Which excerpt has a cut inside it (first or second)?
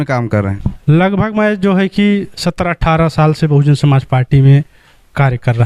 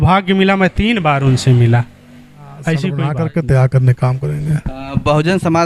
second